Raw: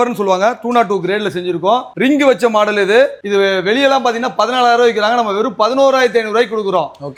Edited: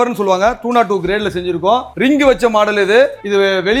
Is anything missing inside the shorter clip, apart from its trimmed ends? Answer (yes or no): no